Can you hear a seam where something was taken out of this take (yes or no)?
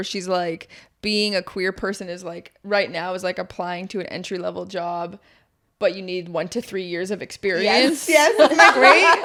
no